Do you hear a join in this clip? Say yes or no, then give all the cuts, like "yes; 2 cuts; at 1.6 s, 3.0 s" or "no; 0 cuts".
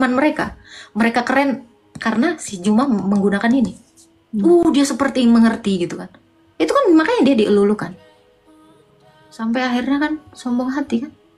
no; 0 cuts